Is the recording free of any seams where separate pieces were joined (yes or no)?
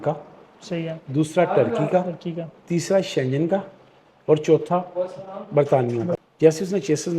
no